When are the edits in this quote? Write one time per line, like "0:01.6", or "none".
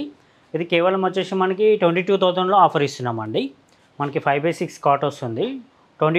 none